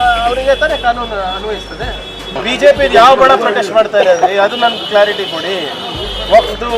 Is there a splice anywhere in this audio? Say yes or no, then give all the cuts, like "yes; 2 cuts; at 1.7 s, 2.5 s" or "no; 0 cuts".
yes; 1 cut; at 2.4 s